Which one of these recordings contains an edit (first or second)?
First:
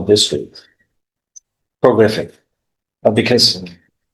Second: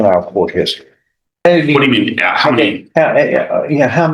second